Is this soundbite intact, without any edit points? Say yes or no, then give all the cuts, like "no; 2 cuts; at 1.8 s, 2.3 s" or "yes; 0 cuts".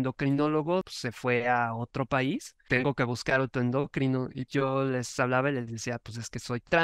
no; 3 cuts; at 1.0 s, 2.5 s, 4.4 s